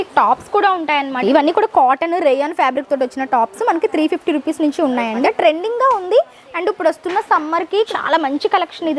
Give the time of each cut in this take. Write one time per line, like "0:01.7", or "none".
0:01.2
0:05.2
0:07.9